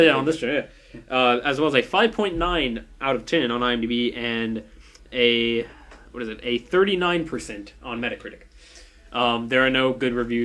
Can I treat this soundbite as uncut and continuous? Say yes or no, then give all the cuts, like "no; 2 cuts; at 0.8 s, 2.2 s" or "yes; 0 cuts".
yes; 0 cuts